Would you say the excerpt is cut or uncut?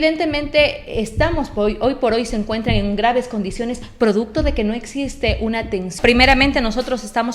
cut